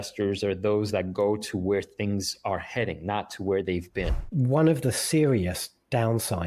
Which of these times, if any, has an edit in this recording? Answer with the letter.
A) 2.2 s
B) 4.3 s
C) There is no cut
B